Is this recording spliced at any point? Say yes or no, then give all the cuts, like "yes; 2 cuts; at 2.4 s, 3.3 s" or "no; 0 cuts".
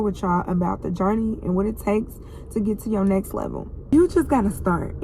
yes; 1 cut; at 3.9 s